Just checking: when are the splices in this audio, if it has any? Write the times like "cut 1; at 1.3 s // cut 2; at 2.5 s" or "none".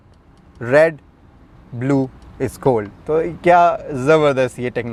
none